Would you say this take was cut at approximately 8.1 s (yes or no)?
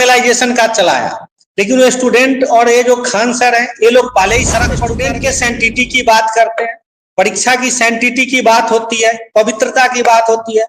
no